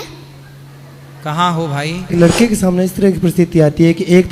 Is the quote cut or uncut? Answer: cut